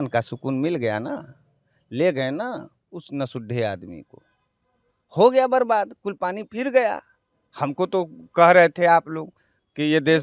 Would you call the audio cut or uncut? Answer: uncut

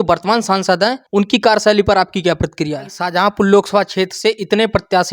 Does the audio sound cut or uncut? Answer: cut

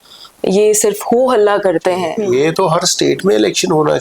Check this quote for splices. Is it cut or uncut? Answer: cut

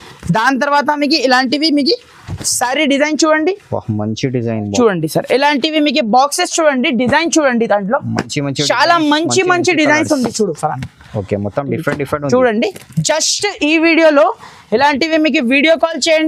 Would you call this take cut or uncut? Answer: uncut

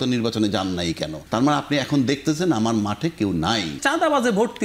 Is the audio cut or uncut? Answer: cut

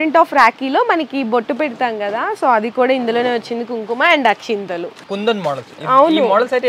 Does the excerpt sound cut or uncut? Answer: cut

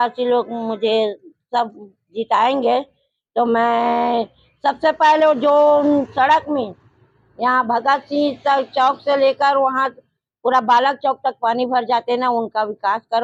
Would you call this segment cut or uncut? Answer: uncut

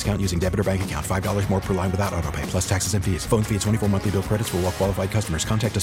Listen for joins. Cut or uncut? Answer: uncut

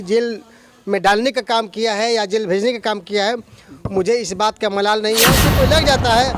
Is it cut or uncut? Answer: cut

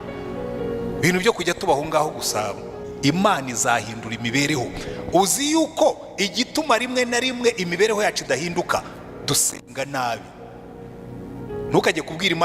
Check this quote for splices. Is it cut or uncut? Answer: cut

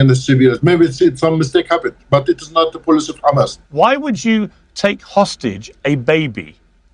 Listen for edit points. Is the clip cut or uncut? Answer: cut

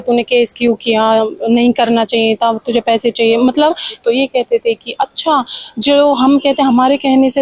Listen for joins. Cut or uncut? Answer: cut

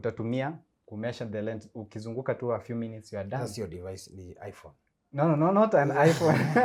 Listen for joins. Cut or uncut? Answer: uncut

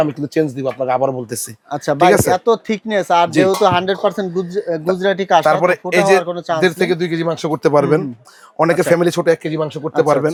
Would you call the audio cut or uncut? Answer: uncut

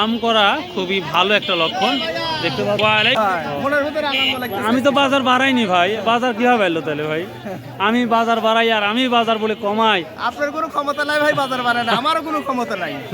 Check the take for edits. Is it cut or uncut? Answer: cut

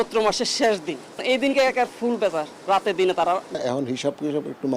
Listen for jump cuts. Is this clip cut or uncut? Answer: cut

